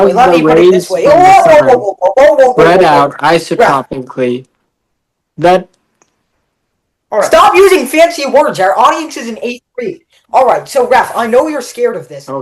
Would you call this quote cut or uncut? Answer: uncut